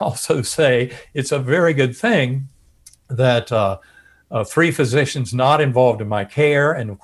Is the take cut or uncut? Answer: uncut